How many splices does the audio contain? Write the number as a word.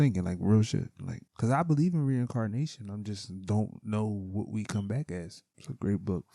two